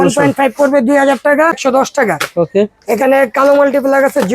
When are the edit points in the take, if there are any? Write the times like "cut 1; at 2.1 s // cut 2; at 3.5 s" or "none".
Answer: cut 1; at 1.6 s